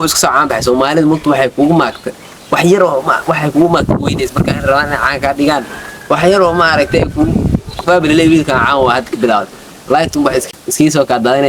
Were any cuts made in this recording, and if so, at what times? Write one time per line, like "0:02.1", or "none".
0:10.4